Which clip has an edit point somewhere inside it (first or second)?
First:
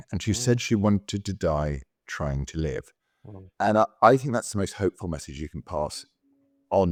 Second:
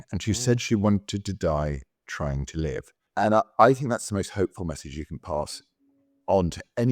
second